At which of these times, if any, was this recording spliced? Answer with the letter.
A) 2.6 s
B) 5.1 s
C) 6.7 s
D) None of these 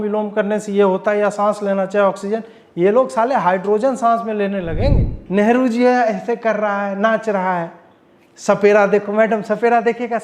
B